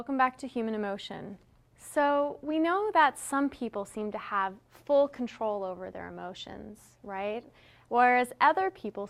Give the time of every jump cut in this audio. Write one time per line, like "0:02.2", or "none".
none